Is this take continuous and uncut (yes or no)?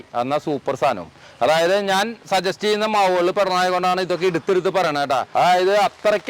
no